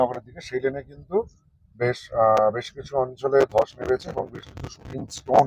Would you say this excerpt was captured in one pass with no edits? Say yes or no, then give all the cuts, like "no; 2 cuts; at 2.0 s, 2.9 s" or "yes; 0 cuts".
yes; 0 cuts